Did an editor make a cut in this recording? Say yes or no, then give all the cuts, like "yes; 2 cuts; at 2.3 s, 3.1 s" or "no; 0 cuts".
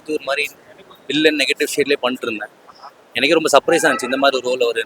no; 0 cuts